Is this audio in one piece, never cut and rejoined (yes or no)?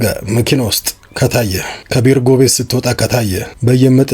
no